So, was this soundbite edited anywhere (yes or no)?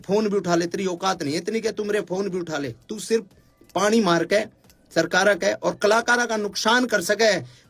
no